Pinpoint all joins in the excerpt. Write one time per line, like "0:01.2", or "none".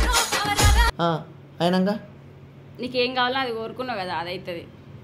none